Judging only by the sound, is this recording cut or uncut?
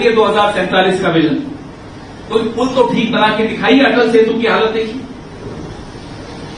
uncut